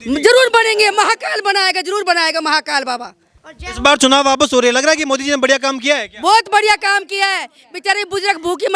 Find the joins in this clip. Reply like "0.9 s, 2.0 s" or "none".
3.3 s